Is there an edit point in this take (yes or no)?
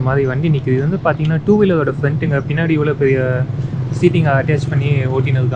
no